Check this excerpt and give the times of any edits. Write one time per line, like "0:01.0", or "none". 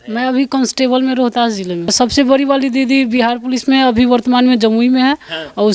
0:01.9